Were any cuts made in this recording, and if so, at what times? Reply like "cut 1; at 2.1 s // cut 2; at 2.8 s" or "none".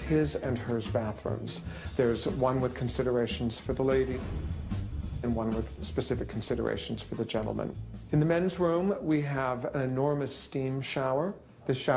cut 1; at 9.9 s

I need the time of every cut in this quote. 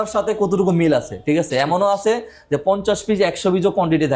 none

